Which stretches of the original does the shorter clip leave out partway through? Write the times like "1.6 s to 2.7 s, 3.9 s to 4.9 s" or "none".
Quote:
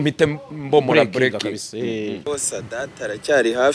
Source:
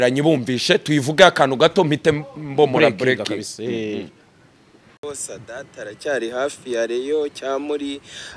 4.1 s to 5.0 s